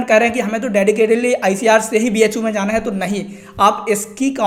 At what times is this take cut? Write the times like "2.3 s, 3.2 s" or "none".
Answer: none